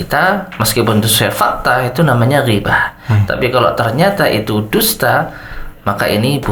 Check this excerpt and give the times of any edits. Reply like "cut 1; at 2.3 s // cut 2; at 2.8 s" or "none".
none

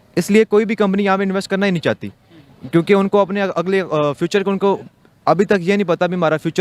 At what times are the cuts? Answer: none

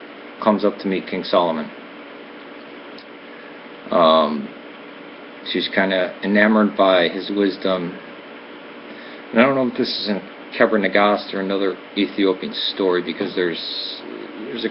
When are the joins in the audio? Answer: cut 1; at 6.8 s

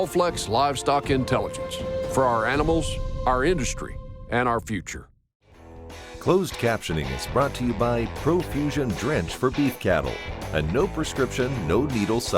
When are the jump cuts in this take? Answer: cut 1; at 5.6 s

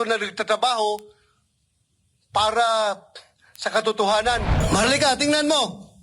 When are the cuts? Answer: cut 1; at 4.5 s

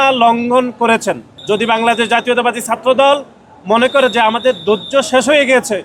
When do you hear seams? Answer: cut 1; at 1.3 s

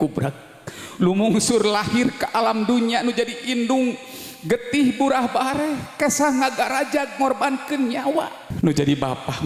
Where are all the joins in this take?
cut 1; at 8.4 s

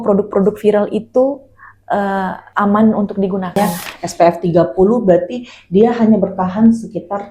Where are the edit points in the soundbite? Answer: cut 1; at 3.6 s

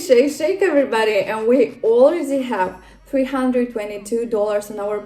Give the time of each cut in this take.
none

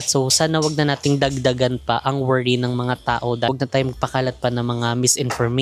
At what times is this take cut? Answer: cut 1; at 3.5 s

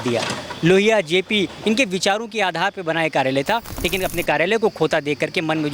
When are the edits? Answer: cut 1; at 3.8 s

